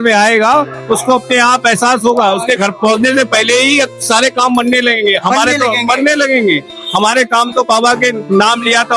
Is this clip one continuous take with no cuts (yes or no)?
yes